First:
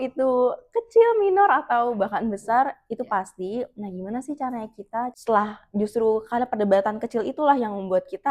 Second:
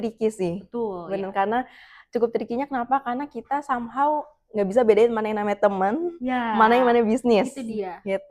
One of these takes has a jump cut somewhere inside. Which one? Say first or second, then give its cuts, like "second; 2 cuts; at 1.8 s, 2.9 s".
first; 1 cut; at 5.2 s